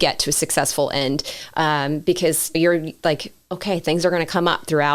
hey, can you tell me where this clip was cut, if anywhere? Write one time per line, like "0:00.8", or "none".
0:02.5